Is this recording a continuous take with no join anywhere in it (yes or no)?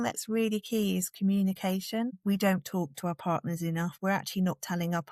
yes